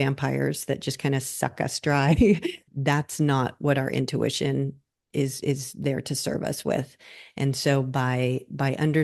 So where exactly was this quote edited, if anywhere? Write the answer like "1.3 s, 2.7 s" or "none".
2.7 s

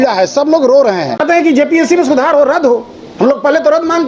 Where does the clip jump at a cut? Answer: 1.1 s

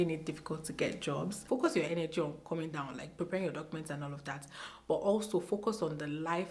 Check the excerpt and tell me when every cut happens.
1.4 s

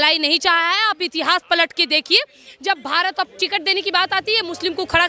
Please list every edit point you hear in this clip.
3.3 s

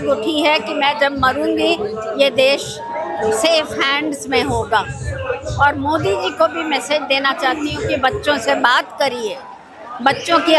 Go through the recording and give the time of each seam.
none

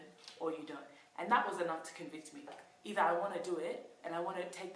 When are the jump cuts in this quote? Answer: 2.5 s

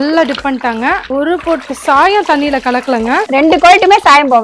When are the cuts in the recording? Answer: 1.0 s, 3.3 s

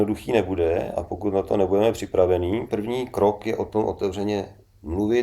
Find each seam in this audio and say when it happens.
2.7 s

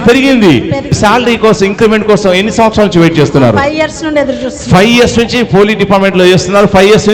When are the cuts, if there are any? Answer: 1.0 s

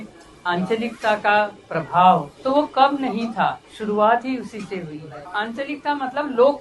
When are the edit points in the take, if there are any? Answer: 2.3 s, 3.7 s, 5.2 s

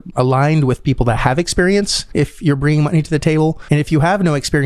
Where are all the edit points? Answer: 2.0 s, 3.6 s

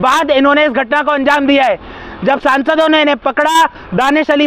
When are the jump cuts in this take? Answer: none

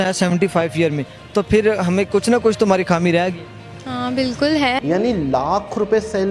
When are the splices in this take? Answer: 4.8 s

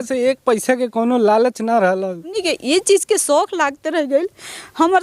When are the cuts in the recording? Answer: 2.4 s

